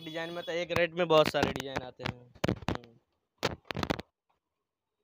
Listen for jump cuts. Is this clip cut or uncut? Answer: uncut